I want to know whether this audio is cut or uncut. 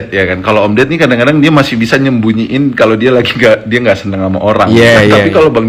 uncut